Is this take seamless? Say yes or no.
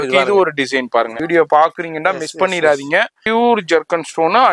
no